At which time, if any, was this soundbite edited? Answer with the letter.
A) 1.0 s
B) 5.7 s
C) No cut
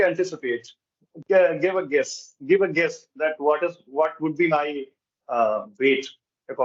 C